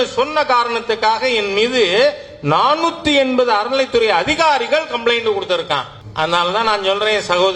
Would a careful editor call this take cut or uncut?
cut